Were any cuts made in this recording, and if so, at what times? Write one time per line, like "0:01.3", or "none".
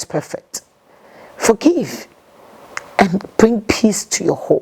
none